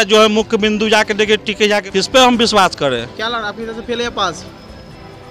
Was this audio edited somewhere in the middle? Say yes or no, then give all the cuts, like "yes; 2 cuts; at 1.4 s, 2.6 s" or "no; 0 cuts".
yes; 1 cut; at 1.9 s